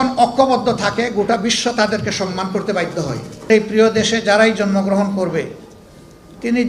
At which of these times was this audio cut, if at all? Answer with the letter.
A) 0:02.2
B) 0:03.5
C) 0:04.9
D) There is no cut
B